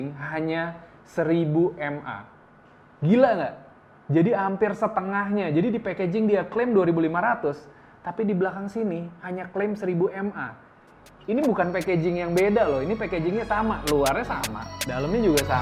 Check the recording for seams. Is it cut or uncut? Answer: uncut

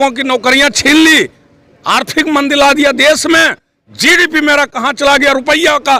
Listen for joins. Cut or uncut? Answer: uncut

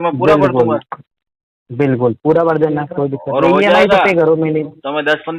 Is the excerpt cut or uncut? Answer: uncut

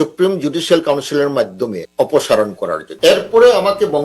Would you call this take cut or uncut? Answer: cut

